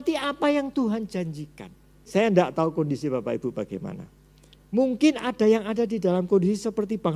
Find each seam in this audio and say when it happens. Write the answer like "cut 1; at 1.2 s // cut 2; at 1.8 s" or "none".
cut 1; at 2.1 s